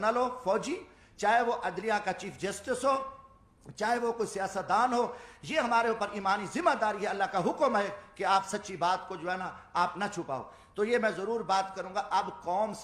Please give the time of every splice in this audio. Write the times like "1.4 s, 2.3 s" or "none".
none

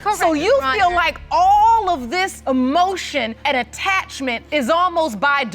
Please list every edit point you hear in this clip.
2.3 s, 3.4 s, 4.4 s

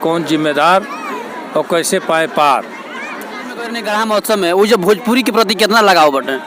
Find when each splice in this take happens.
3.8 s

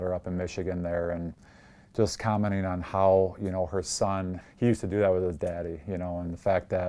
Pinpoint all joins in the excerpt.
4.4 s

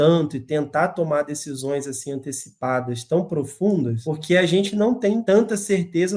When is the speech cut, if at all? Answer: 4.1 s, 5.2 s

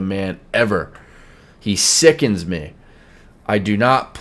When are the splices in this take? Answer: none

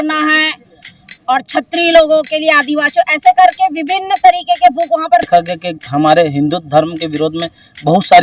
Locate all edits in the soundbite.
5.3 s

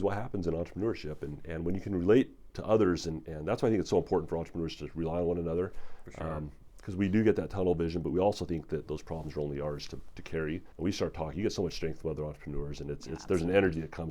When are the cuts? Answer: 10.7 s

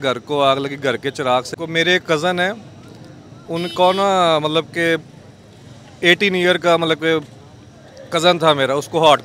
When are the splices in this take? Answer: 1.5 s

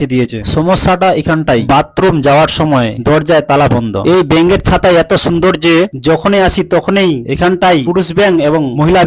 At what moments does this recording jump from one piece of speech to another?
4.0 s

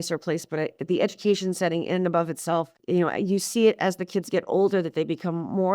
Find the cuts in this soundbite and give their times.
2.8 s

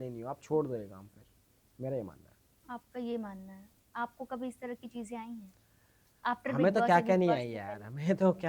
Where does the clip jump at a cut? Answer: none

